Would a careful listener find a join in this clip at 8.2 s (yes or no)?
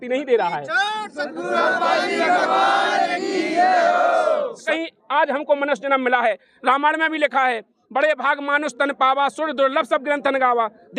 no